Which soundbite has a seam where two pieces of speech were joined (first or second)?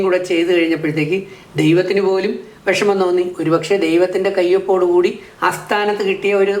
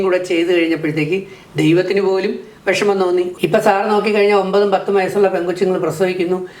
second